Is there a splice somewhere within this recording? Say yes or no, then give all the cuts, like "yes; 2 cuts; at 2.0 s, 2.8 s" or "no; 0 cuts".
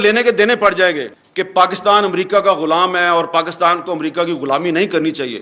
yes; 1 cut; at 1.1 s